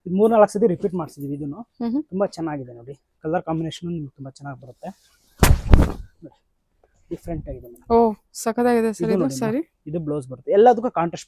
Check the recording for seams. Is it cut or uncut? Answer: uncut